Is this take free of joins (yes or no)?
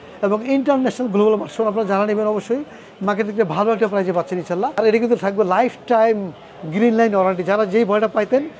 no